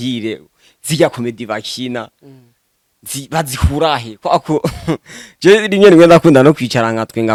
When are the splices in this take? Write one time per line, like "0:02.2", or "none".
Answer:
none